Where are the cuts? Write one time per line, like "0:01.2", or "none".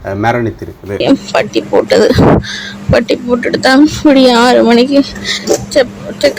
0:01.0